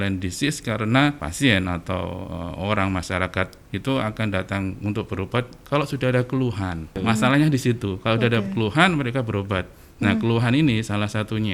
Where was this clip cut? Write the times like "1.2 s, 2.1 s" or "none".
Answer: 1.3 s, 6.9 s